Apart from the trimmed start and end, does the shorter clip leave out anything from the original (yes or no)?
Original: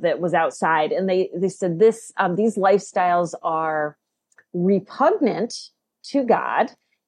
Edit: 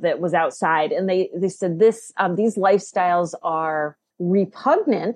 yes